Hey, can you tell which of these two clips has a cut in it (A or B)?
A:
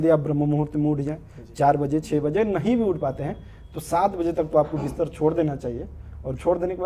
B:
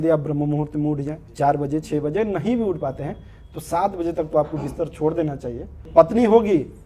B